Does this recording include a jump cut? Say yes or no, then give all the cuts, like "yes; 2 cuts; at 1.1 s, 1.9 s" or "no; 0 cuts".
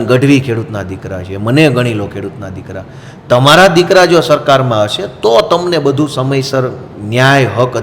no; 0 cuts